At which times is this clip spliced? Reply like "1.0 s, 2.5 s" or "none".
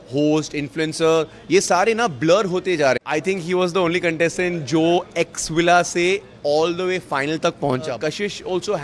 3.0 s, 7.9 s